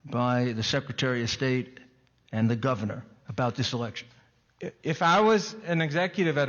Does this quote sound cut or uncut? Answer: uncut